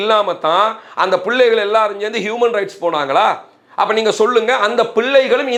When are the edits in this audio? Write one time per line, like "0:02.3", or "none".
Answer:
none